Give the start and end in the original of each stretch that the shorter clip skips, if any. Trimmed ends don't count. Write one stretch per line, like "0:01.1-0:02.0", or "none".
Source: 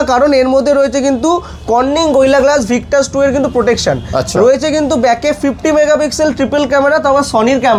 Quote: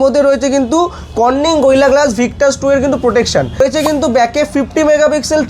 0:04.1-0:04.5